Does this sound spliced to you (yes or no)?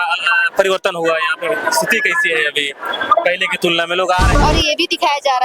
yes